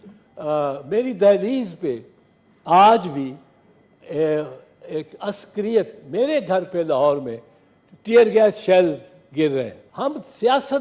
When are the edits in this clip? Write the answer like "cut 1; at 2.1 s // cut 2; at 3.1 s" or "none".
cut 1; at 9.8 s